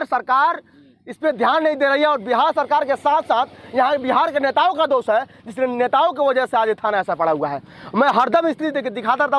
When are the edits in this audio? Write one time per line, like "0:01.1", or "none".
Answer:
none